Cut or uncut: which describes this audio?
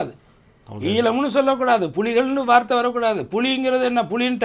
uncut